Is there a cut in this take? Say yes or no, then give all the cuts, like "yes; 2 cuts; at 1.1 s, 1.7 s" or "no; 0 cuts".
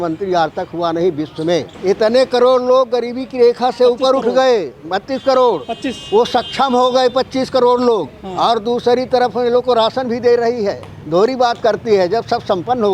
yes; 1 cut; at 1.7 s